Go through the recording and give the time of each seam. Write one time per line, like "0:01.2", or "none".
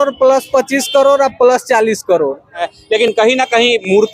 0:02.7